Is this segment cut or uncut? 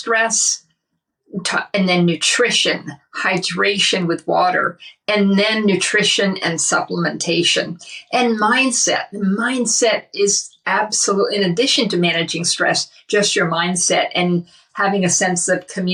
uncut